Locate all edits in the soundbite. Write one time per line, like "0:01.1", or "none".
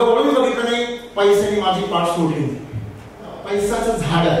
0:03.4